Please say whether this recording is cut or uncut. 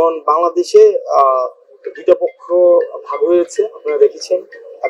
uncut